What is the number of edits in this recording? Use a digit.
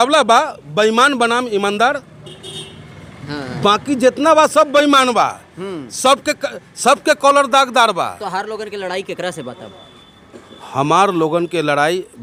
0